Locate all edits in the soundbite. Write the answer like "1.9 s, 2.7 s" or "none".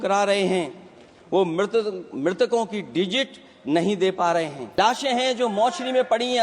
4.8 s